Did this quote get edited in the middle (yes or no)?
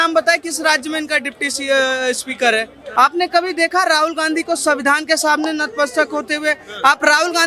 yes